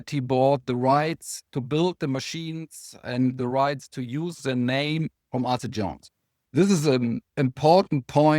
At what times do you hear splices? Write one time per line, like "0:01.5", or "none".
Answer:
0:06.4

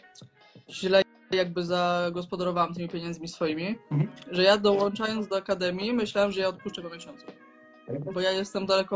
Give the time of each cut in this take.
0:03.8

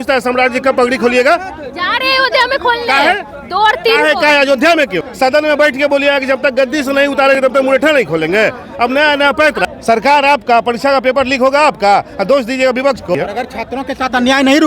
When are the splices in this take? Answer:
0:05.0
0:09.6
0:13.2

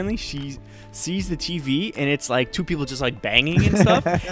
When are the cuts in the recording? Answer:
none

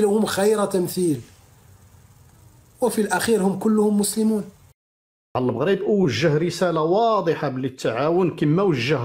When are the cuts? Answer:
0:05.3

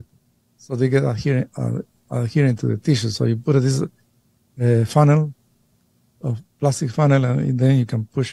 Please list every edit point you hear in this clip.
none

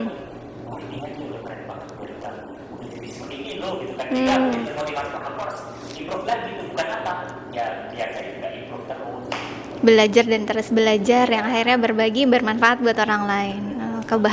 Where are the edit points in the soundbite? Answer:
none

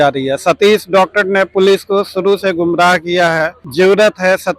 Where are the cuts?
0:03.6

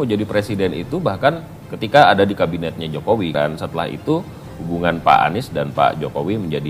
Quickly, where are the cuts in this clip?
0:03.3

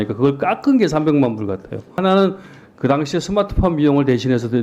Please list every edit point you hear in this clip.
0:02.0

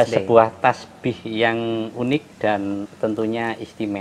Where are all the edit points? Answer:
0:02.9

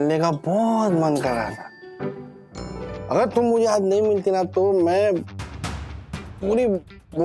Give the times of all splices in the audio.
none

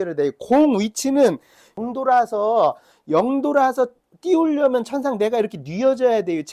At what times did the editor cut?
0:01.7

